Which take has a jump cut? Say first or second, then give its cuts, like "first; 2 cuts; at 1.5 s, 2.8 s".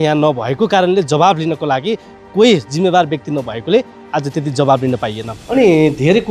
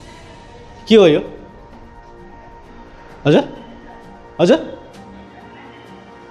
first; 1 cut; at 5.3 s